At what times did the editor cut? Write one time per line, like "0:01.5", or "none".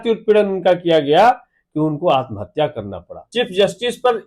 0:03.3